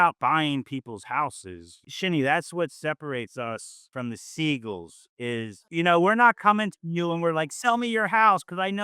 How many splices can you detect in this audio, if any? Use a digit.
1